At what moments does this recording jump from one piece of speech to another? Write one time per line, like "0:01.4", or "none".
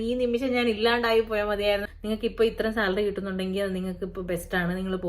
0:01.9